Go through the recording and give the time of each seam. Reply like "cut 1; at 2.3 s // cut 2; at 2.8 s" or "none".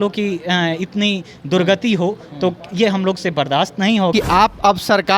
cut 1; at 4.1 s